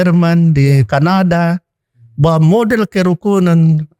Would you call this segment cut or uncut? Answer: uncut